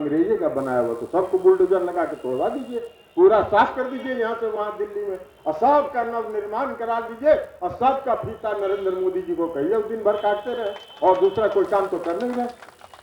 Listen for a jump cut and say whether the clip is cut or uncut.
uncut